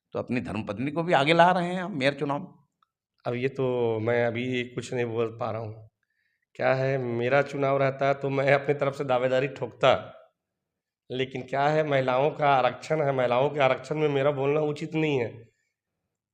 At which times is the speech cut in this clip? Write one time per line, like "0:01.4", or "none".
none